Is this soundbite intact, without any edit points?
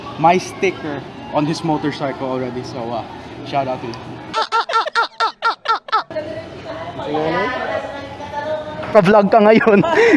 no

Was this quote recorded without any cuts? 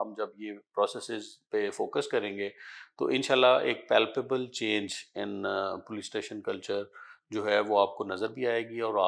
yes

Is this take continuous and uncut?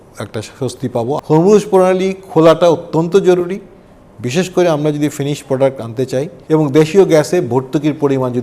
no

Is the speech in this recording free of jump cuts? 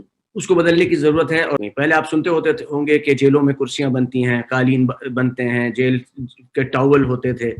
no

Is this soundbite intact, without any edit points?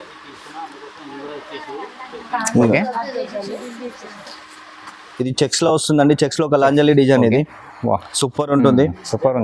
yes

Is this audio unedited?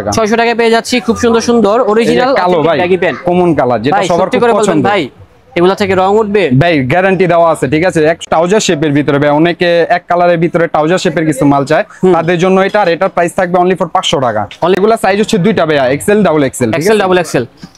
no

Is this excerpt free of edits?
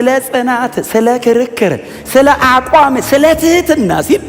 yes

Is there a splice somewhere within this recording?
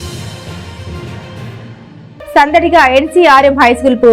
yes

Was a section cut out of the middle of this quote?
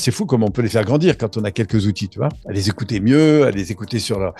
no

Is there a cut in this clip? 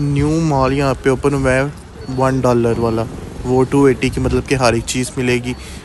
no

